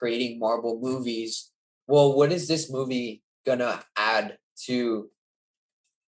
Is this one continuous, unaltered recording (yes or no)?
no